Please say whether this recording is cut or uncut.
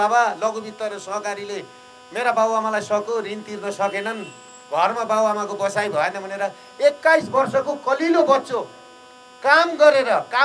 uncut